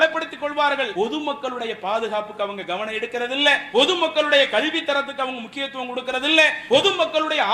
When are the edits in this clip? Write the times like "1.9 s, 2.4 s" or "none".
0.9 s, 3.6 s, 6.6 s